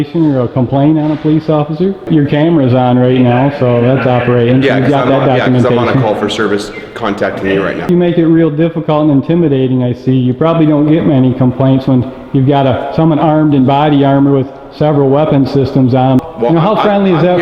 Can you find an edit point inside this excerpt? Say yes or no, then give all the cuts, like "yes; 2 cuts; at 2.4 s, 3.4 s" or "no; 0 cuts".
yes; 3 cuts; at 2.0 s, 7.9 s, 16.2 s